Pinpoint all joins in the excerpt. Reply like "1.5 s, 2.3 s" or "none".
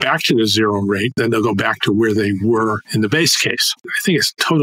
1.1 s, 3.9 s